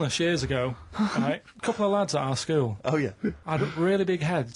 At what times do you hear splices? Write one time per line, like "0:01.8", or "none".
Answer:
0:01.5
0:03.4